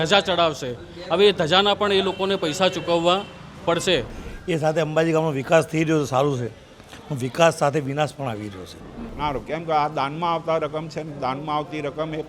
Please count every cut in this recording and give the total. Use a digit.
2